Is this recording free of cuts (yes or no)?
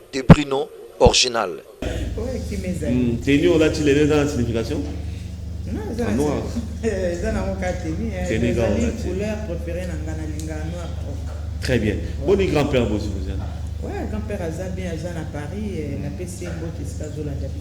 yes